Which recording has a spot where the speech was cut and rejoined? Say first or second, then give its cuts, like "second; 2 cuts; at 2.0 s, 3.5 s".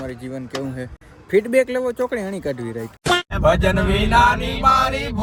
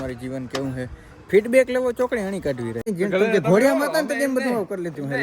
second; 1 cut; at 2.8 s